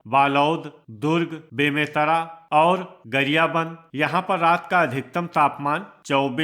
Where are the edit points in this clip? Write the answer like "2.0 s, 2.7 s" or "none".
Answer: 2.4 s, 3.8 s